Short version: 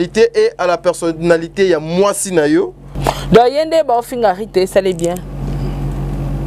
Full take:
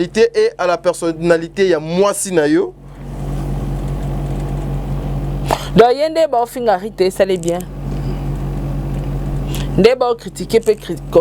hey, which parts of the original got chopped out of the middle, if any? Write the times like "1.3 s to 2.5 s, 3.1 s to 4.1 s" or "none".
2.9 s to 5.3 s